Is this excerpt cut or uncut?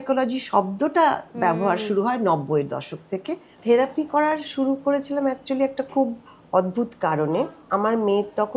cut